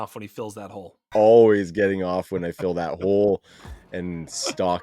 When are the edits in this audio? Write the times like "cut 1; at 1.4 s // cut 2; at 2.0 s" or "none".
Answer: cut 1; at 1.1 s